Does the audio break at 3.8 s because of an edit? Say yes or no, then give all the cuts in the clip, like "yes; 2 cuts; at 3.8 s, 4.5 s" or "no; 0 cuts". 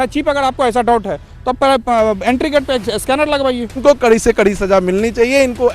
yes; 1 cut; at 3.8 s